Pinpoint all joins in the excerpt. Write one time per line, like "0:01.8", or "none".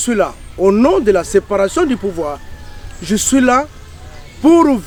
none